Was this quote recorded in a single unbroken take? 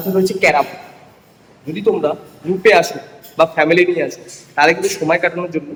yes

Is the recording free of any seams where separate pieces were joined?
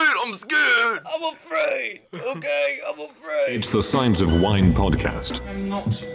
no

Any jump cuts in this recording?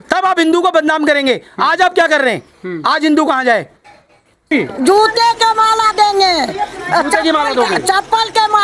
yes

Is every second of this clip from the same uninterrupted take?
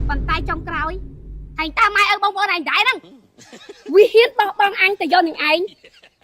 no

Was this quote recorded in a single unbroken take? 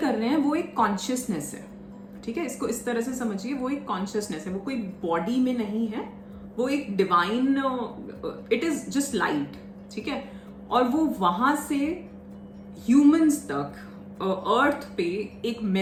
yes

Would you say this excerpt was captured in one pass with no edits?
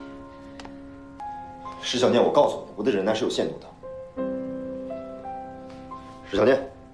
no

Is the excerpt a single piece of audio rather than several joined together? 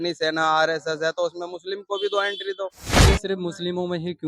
no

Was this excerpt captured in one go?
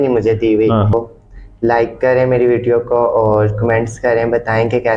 no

